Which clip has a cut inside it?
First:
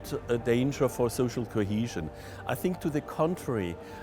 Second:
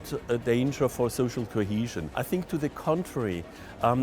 second; 1 cut; at 2.0 s

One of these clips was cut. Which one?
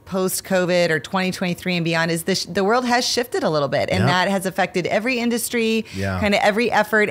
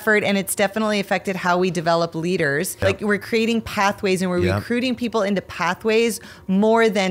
second; 1 cut; at 2.7 s

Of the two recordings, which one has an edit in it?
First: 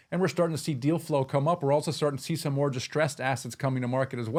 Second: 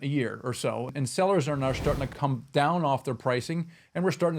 second; 2 cuts; at 0.9 s, 2.1 s

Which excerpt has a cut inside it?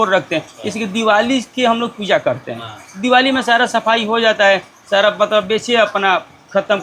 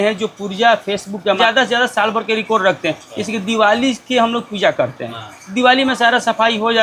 second; 1 cut; at 1.4 s

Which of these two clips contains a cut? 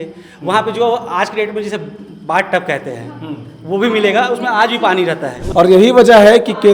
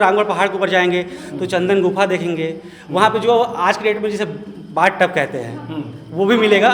first; 1 cut; at 5.3 s

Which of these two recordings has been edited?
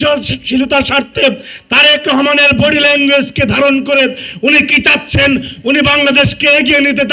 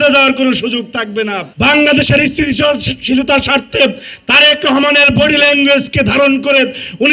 second; 1 cut; at 1.4 s

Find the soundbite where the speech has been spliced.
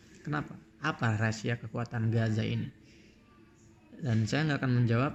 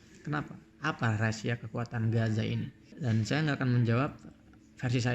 second; 1 cut; at 2.8 s

